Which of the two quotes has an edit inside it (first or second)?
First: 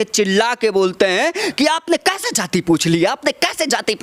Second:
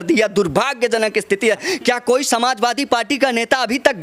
second